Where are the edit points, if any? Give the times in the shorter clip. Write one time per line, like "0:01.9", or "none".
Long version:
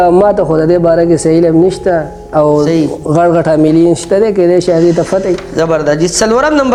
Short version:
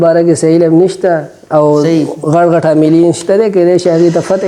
none